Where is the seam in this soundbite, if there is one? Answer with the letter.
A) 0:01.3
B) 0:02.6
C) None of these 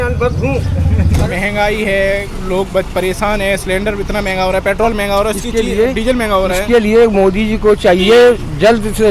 A